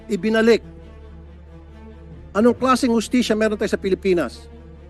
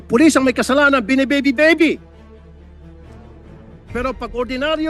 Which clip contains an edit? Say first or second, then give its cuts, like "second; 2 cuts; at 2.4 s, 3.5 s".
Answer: second; 2 cuts; at 2.0 s, 3.9 s